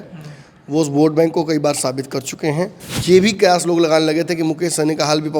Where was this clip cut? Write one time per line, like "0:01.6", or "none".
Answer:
0:02.9